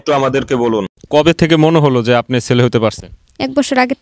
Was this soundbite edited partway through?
yes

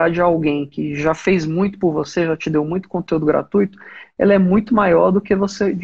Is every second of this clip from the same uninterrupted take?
yes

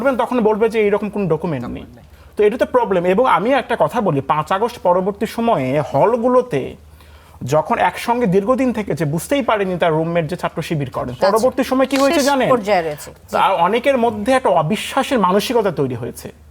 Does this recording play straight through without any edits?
yes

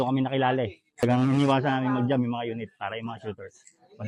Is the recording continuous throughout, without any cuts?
no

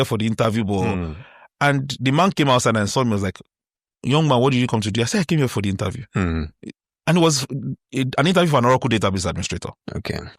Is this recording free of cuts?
yes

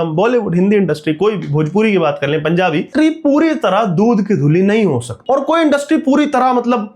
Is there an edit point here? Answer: yes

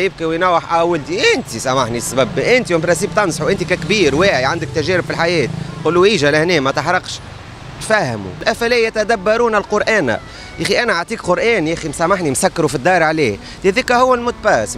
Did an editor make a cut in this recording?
yes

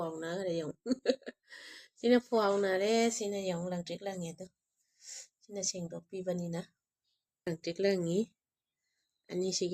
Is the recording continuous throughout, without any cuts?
no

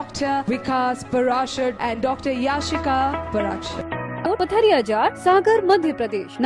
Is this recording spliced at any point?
yes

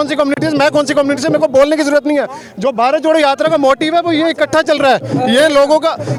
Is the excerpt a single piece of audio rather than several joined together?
yes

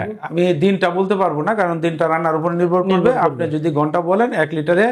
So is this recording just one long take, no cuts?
yes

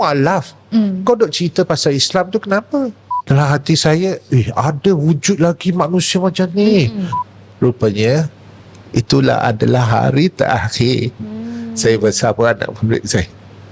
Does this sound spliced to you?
yes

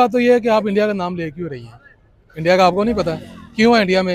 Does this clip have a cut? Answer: no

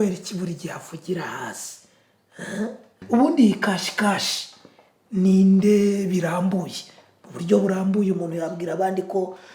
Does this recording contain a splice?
yes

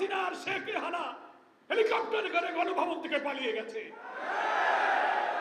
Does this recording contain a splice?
no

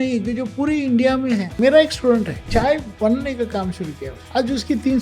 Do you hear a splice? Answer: yes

